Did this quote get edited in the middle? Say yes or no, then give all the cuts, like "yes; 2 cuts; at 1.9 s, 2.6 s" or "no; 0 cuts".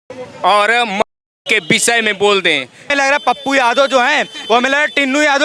yes; 1 cut; at 2.9 s